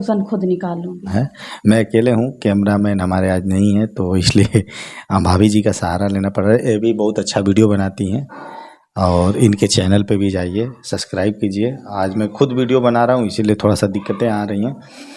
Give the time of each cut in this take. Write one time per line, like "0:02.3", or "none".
none